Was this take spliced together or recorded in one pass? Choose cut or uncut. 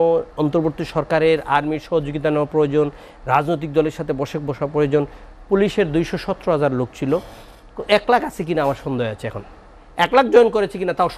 uncut